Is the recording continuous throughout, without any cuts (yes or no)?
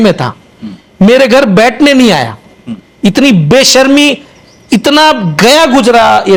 yes